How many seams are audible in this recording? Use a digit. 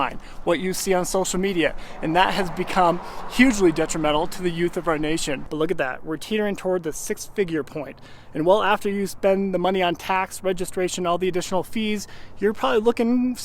1